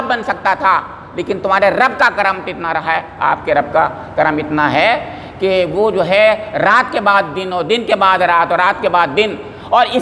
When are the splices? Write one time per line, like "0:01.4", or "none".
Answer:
none